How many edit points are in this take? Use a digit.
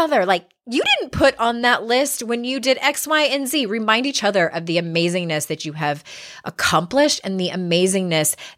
0